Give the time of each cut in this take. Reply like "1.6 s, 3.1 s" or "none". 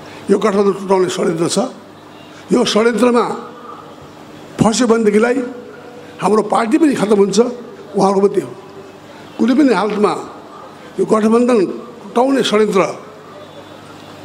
none